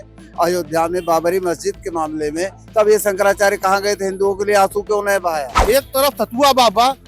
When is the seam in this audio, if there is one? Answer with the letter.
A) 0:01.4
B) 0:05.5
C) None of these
B